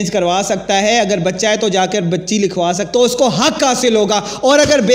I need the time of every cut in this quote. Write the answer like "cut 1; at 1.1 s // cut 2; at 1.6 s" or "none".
cut 1; at 2.8 s

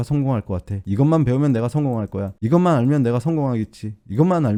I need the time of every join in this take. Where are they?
none

